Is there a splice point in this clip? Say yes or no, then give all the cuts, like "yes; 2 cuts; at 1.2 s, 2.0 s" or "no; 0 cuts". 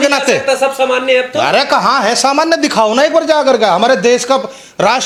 no; 0 cuts